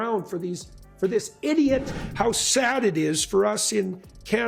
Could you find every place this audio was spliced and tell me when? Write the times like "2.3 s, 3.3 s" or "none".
2.0 s